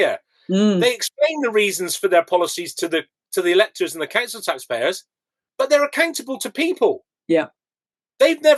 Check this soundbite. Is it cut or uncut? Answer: uncut